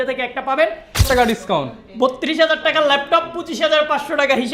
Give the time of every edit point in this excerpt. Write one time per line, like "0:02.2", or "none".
0:01.1